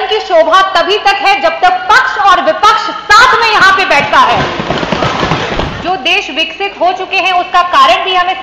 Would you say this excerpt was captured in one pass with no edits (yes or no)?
no